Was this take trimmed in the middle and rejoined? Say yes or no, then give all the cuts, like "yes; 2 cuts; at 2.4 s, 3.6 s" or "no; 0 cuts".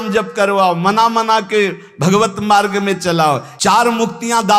yes; 1 cut; at 3.5 s